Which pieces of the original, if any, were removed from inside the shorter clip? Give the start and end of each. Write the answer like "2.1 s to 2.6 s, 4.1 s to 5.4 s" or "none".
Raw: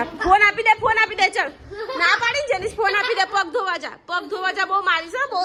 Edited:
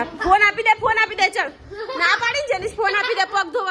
none